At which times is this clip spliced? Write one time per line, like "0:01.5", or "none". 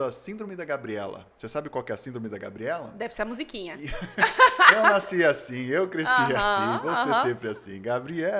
none

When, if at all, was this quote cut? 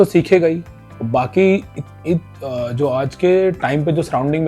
none

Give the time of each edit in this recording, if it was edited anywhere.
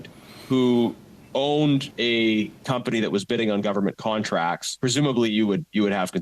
0:01.9
0:04.7

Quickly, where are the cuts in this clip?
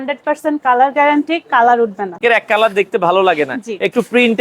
0:02.2

